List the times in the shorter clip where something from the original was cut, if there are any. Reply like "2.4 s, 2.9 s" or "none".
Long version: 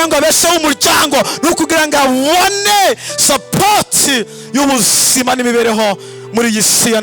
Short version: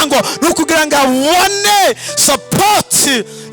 none